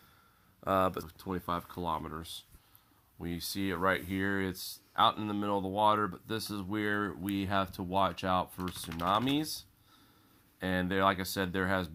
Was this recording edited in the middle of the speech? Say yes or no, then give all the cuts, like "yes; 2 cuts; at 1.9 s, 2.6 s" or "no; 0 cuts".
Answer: no; 0 cuts